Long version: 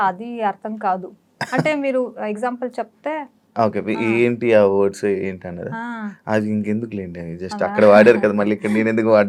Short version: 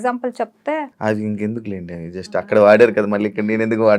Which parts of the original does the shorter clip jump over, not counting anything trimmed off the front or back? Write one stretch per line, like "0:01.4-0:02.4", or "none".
0:03.3-0:06.2